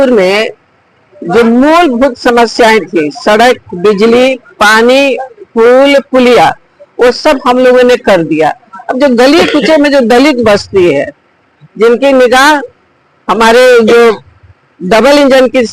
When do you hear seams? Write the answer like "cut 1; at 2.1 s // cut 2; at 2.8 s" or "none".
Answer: none